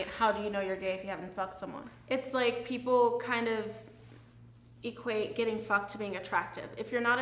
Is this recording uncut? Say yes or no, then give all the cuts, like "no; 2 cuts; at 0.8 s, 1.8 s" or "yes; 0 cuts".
no; 1 cut; at 1.9 s